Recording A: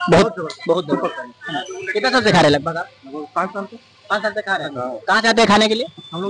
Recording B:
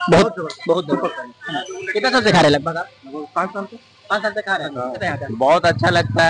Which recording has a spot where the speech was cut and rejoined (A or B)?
B